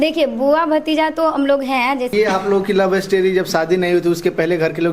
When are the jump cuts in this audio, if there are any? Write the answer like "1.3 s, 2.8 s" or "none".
2.1 s